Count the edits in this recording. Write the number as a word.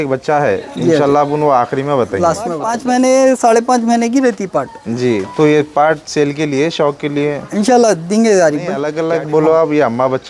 two